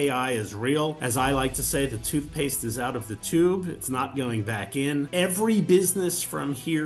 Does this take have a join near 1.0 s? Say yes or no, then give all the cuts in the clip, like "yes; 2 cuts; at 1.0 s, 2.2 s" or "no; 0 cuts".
yes; 2 cuts; at 1.0 s, 5.1 s